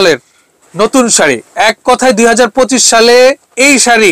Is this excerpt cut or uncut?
uncut